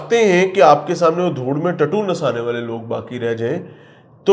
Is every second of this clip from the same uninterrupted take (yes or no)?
yes